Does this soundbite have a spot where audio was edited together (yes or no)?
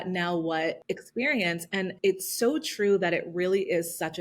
yes